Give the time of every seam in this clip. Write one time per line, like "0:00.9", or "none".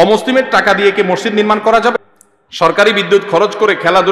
0:01.9